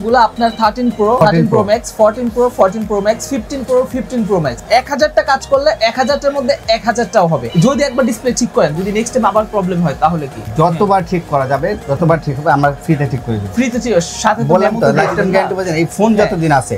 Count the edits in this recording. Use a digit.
4